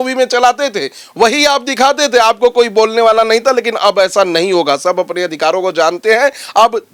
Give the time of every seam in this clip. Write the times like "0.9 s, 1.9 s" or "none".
none